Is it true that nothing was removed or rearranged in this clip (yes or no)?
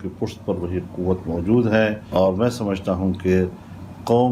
no